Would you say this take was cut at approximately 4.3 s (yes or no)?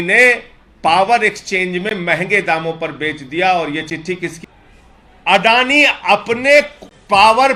yes